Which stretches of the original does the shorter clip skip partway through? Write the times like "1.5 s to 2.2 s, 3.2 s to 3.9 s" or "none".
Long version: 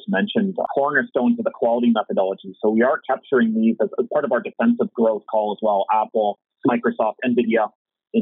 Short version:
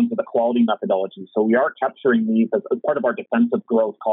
none